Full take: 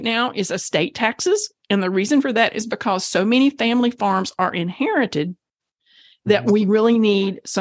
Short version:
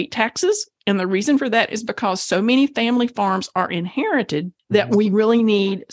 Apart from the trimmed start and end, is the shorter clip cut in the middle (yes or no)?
yes